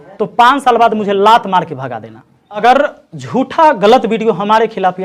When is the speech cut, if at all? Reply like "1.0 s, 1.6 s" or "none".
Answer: 2.6 s